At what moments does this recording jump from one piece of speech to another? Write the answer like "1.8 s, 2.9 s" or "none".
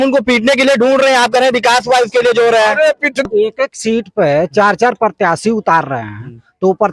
3.3 s